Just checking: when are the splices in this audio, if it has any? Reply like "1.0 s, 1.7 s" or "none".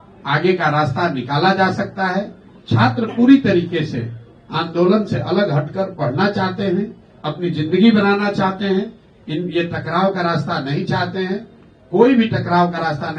none